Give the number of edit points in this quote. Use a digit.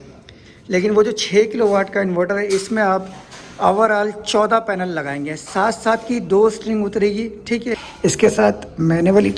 1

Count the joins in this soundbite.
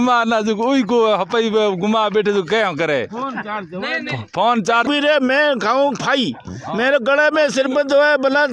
1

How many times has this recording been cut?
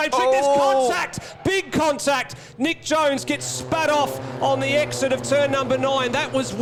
0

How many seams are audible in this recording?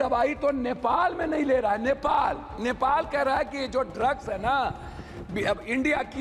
0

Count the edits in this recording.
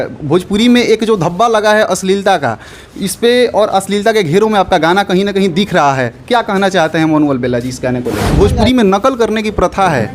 1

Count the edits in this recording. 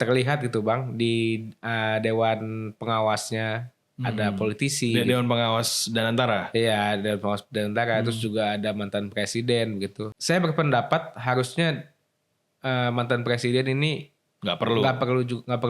1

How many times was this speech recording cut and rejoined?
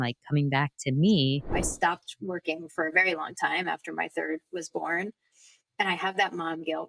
1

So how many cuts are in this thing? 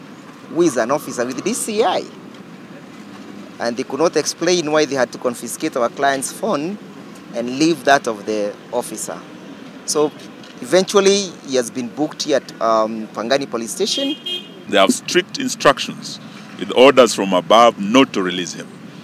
1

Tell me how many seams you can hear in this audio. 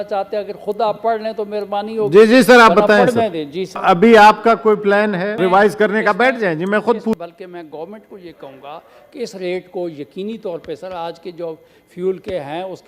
3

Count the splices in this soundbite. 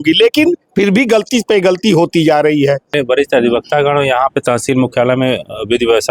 1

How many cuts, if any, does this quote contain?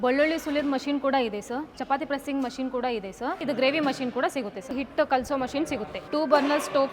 3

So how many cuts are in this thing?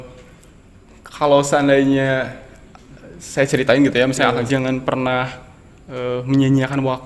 1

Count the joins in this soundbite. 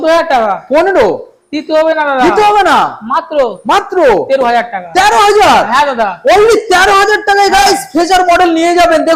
0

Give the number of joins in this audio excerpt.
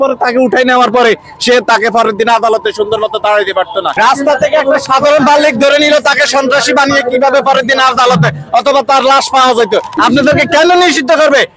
2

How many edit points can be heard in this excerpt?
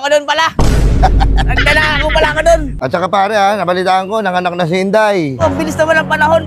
1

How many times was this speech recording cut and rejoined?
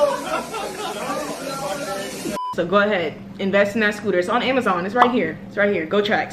1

